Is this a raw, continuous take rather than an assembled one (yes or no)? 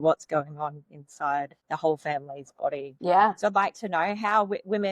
no